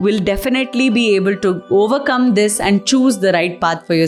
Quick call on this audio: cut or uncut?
uncut